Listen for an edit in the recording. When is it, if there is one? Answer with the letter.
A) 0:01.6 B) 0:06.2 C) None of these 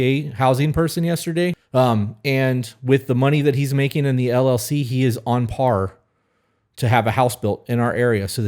A